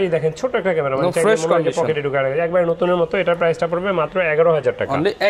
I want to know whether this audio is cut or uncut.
uncut